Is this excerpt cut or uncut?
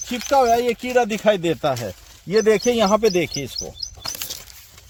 uncut